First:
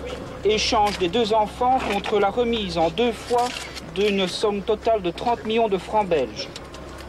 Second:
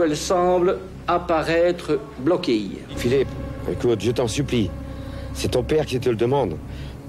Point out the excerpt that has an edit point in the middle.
second; 1 cut; at 2.9 s

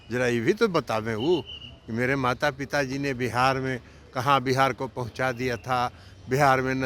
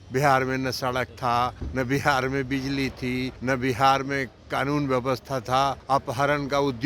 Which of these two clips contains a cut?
second; 3 cuts; at 1.6 s, 3.3 s, 5.8 s

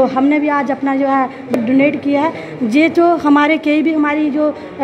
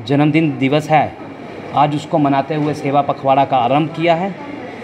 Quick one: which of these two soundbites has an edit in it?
first; 1 cut; at 1.6 s

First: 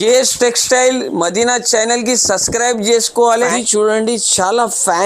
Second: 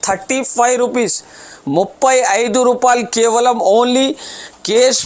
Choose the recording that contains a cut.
first; 1 cut; at 3.5 s

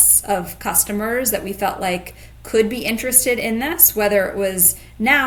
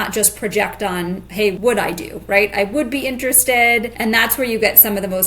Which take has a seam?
second; 2 cuts; at 1.6 s, 3.9 s

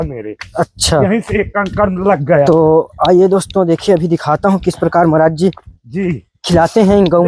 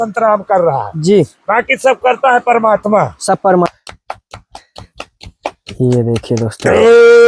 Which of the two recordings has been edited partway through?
second; 1 cut; at 3.7 s

